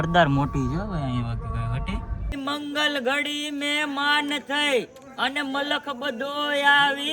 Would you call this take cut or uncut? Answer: cut